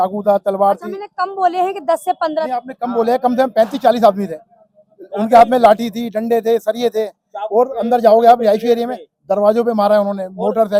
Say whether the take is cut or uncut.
uncut